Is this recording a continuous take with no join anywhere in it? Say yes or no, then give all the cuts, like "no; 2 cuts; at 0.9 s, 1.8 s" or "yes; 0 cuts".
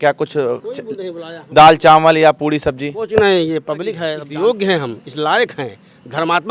no; 1 cut; at 4.2 s